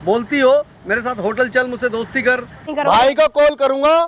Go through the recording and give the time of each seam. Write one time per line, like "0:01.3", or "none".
0:02.7